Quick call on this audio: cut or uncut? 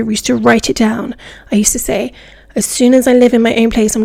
uncut